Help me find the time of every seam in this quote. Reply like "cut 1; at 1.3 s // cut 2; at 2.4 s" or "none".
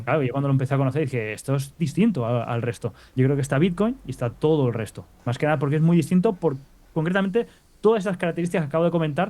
cut 1; at 3.0 s